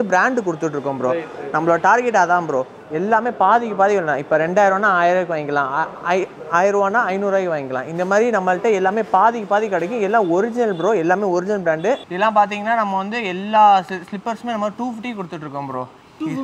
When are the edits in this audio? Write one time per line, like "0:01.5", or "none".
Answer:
0:02.8
0:12.0